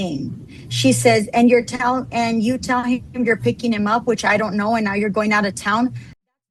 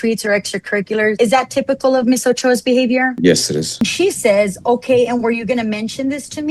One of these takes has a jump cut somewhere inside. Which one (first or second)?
second